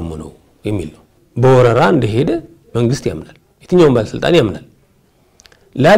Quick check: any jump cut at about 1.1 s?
yes; 1 cut; at 1.1 s

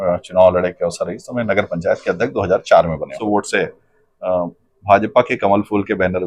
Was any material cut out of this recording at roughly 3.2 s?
yes; 1 cut; at 3.2 s

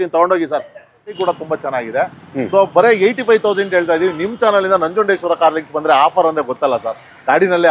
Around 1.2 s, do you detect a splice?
yes; 1 cut; at 1.2 s

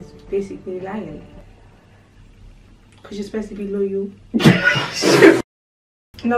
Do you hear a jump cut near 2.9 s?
yes; 2 cuts; at 2.9 s, 5.4 s

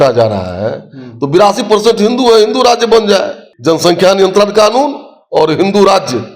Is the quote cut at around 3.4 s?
yes; 1 cut; at 3.4 s

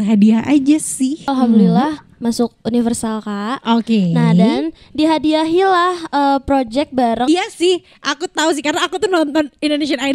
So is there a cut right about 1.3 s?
yes; 2 cuts; at 1.3 s, 7.2 s

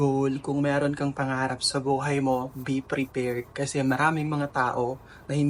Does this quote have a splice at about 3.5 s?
no; 0 cuts

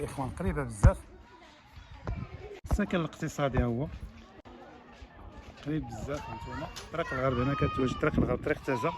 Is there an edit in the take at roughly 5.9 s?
no; 1 cut; at 2.6 s

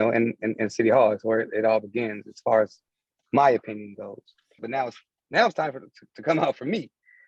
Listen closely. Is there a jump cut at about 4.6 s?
yes; 1 cut; at 4.6 s

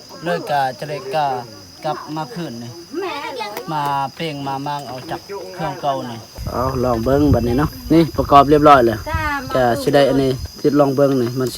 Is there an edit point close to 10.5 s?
yes; 3 cuts; at 6.4 s, 7.8 s, 10.5 s

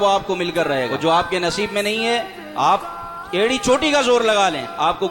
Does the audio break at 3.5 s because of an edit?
no; 1 cut; at 0.9 s

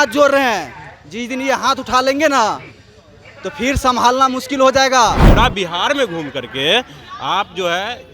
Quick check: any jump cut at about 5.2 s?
yes; 1 cut; at 5.2 s

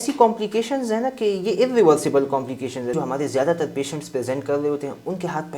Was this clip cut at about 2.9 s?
yes; 1 cut; at 2.9 s

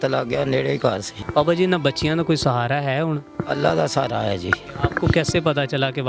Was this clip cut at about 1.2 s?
yes; 2 cuts; at 1.2 s, 4.6 s

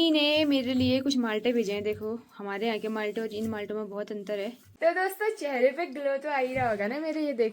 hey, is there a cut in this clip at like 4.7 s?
yes; 1 cut; at 4.7 s

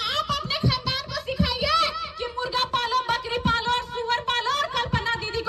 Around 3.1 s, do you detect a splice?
no; 0 cuts

